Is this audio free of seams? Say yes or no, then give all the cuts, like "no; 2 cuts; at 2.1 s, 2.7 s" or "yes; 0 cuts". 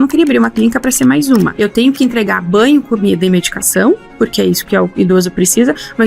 no; 1 cut; at 1.5 s